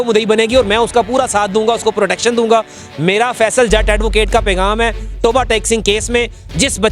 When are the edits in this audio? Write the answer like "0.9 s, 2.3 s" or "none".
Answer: none